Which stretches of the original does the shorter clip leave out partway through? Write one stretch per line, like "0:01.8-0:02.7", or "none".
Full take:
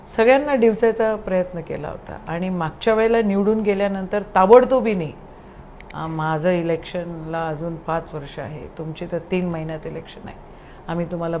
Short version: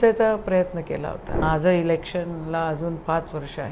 0:02.1-0:06.1